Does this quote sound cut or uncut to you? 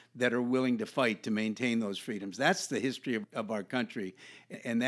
uncut